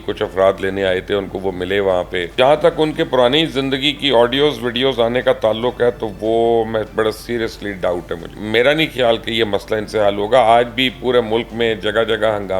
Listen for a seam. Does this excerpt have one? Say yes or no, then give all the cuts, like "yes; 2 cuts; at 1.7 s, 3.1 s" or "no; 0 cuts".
yes; 2 cuts; at 2.3 s, 8.3 s